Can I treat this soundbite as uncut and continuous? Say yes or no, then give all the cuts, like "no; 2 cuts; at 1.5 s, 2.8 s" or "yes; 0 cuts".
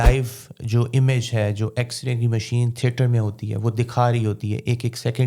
yes; 0 cuts